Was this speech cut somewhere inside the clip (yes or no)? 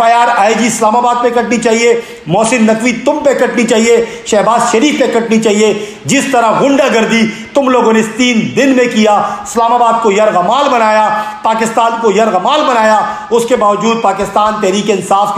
no